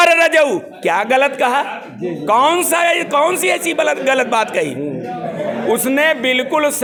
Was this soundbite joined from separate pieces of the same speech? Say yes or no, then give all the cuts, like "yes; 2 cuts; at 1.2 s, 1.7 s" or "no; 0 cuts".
no; 0 cuts